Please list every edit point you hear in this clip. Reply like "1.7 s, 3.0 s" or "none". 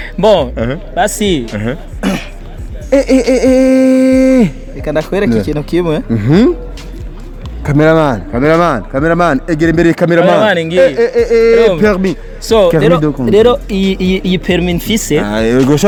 none